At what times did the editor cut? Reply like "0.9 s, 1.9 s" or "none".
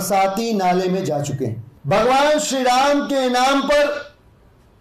1.7 s